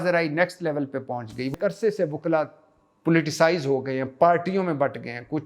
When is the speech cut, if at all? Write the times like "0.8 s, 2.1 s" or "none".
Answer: 1.5 s